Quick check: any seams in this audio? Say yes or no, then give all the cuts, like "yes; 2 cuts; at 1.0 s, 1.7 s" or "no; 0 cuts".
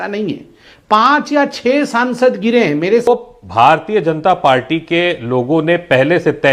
yes; 1 cut; at 3.1 s